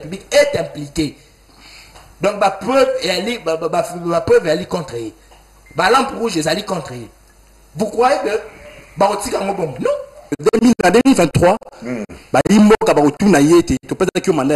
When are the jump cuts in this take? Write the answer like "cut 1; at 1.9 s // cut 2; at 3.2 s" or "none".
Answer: cut 1; at 10.3 s